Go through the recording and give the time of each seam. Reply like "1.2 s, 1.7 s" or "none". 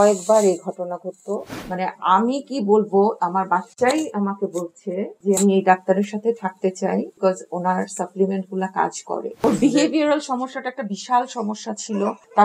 1.5 s, 9.4 s